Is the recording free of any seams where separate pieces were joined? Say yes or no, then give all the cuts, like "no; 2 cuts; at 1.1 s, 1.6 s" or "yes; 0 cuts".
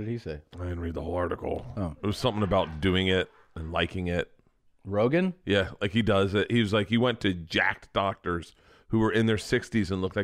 yes; 0 cuts